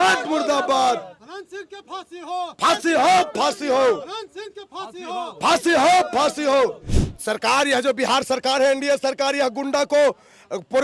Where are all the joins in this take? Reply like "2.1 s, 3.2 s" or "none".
6.9 s